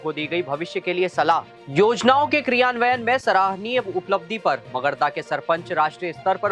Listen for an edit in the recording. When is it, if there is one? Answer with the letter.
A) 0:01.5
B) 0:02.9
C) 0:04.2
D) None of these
A